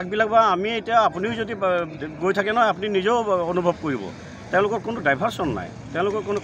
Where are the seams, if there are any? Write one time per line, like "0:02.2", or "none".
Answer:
none